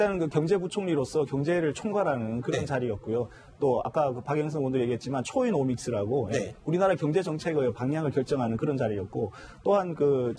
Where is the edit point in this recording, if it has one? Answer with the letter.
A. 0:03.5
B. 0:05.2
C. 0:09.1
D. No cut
D